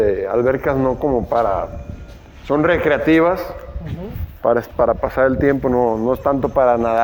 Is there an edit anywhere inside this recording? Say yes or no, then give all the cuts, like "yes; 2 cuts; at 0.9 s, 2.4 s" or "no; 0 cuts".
no; 0 cuts